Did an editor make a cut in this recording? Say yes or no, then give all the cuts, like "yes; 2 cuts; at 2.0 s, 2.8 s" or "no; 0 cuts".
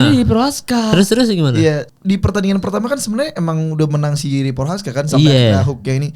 yes; 1 cut; at 1.9 s